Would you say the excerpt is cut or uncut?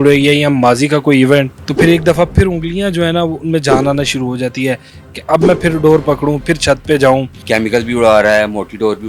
cut